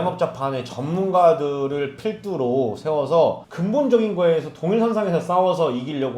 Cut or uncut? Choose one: uncut